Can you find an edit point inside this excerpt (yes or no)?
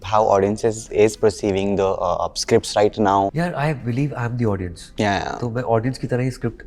yes